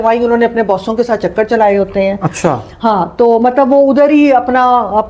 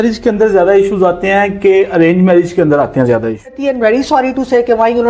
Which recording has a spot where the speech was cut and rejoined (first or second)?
second